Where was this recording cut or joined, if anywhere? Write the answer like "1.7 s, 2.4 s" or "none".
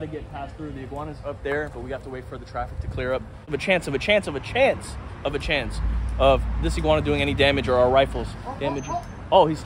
3.5 s